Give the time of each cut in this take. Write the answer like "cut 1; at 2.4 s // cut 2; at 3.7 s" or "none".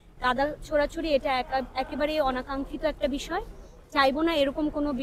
none